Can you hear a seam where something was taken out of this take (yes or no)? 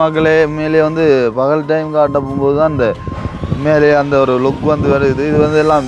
no